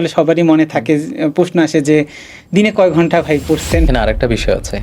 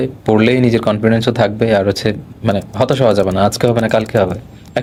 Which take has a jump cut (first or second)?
first